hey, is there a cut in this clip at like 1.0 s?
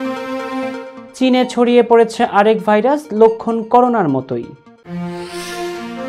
yes; 1 cut; at 1.0 s

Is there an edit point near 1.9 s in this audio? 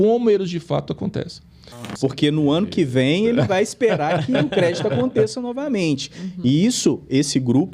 yes; 1 cut; at 1.9 s

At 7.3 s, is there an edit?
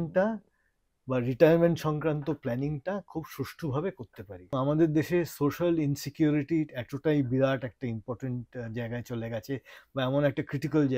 no; 1 cut; at 4.5 s

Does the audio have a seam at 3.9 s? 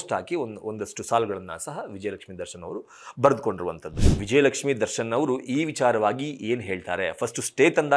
yes; 1 cut; at 3.9 s

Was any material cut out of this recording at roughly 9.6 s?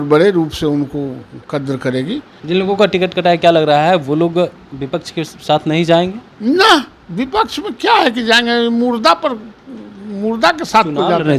no; 1 cut; at 2.3 s

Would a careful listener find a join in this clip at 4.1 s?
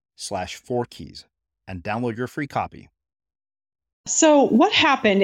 yes; 1 cut; at 4.1 s

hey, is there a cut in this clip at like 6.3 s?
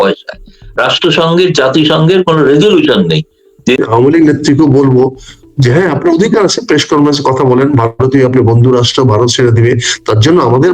no; 1 cut; at 3.8 s

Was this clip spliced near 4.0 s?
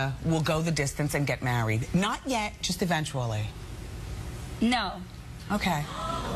no; 0 cuts

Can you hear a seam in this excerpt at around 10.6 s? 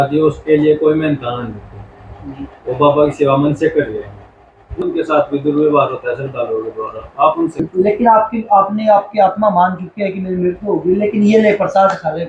no; 2 cuts; at 4.8 s, 7.6 s

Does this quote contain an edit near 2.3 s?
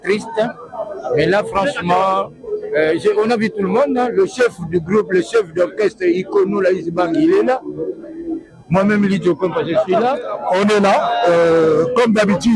no; 1 cut; at 10.4 s

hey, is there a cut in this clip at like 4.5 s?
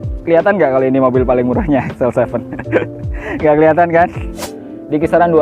yes; 1 cut; at 4.5 s

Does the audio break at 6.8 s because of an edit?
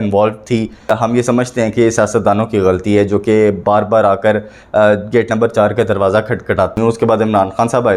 yes; 2 cuts; at 0.9 s, 6.8 s

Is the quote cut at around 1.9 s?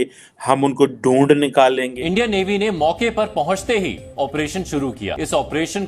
yes; 1 cut; at 1.9 s

